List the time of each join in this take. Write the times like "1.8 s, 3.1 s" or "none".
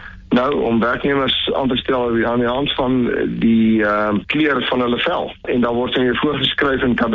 4.3 s, 5.4 s